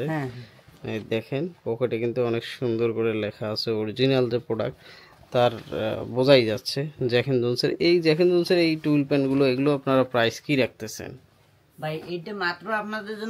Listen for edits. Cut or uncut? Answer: uncut